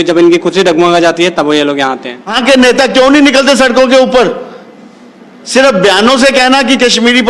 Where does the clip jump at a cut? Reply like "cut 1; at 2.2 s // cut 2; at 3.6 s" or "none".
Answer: cut 1; at 2.4 s

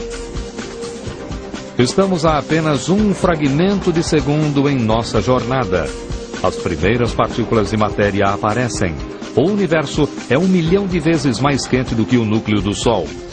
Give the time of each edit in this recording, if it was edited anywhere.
cut 1; at 4.5 s

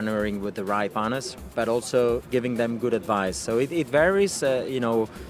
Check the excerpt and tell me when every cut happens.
cut 1; at 1.0 s // cut 2; at 2.2 s

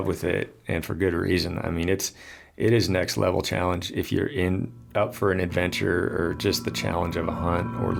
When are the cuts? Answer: none

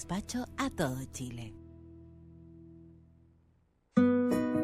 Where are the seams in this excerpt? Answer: cut 1; at 3.7 s

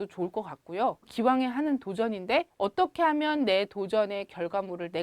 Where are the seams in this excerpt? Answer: cut 1; at 1.1 s // cut 2; at 2.5 s

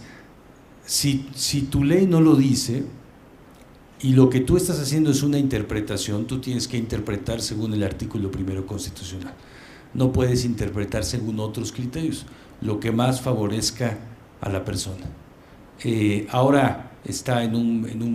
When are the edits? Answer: cut 1; at 7.4 s

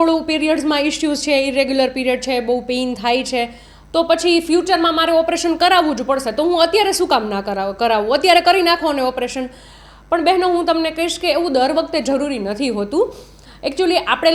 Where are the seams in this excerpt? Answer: none

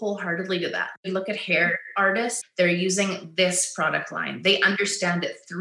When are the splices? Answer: cut 1; at 1.0 s // cut 2; at 2.4 s

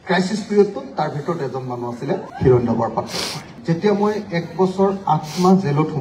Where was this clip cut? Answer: cut 1; at 3.4 s

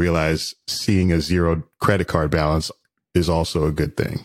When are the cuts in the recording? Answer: none

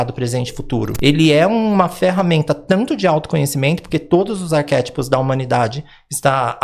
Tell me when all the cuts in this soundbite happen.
cut 1; at 0.9 s

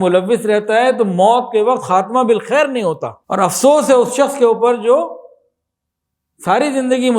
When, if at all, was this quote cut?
cut 1; at 3.1 s

